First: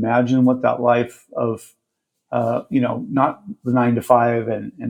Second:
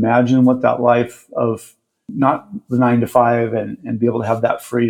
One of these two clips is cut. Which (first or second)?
second